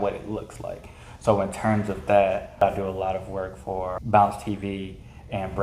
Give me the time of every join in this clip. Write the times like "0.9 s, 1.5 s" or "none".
2.6 s, 4.0 s